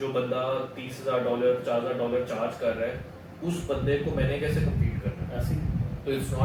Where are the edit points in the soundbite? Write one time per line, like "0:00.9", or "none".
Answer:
none